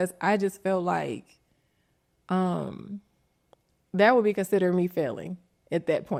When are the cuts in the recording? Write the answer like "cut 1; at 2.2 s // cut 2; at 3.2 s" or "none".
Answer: none